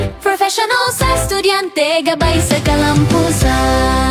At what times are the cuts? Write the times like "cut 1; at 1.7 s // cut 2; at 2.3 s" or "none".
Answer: none